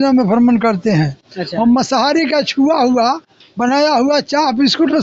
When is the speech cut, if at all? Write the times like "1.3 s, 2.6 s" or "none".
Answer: none